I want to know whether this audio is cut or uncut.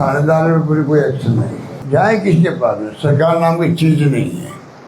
cut